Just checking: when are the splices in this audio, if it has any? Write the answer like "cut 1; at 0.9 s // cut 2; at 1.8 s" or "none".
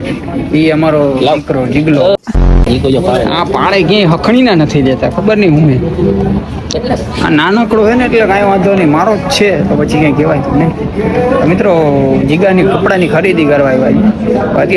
none